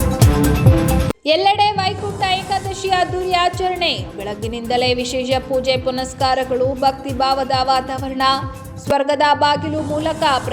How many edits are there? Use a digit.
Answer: 1